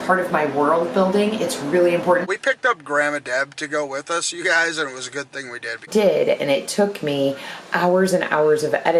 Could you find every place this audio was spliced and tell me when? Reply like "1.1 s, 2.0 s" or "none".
2.3 s, 5.8 s